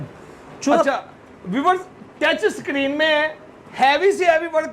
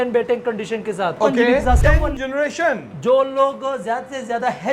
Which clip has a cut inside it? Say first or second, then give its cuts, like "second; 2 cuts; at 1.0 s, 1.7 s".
second; 1 cut; at 1.7 s